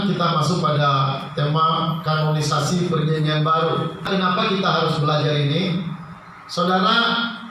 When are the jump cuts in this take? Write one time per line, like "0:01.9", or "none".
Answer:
0:04.1